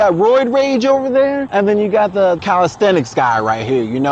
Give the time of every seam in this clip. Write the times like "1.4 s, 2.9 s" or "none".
1.4 s, 2.4 s